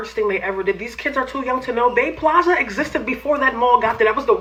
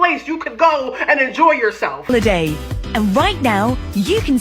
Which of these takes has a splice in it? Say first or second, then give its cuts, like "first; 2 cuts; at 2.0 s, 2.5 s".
second; 1 cut; at 2.1 s